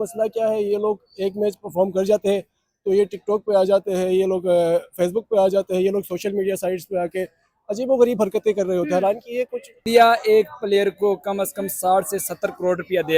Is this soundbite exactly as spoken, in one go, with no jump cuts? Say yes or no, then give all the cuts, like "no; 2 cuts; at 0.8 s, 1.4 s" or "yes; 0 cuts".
no; 1 cut; at 9.9 s